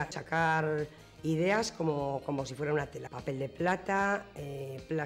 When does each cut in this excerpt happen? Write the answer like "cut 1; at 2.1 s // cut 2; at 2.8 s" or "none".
cut 1; at 3.1 s